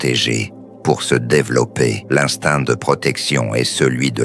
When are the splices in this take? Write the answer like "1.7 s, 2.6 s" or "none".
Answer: 2.0 s

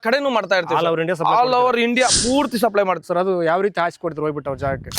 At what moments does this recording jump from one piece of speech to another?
3.0 s

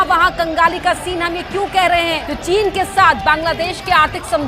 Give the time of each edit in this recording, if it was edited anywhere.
2.3 s

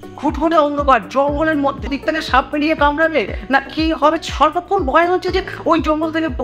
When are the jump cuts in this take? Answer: 1.9 s, 4.2 s

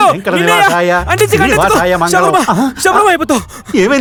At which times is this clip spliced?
none

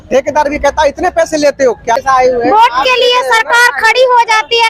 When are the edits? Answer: 2.0 s

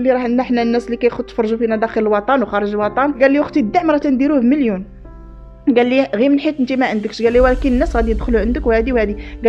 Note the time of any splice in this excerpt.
3.1 s

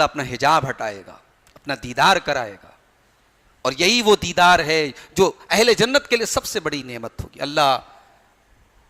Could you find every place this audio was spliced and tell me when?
none

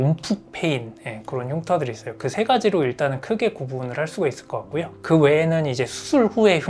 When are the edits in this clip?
none

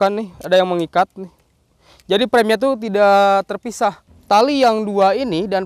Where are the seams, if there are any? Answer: 4.1 s

